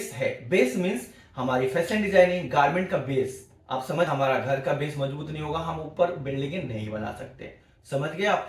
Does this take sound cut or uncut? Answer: cut